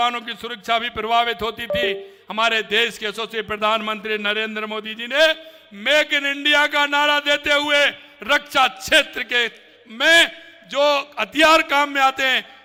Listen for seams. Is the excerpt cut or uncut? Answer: uncut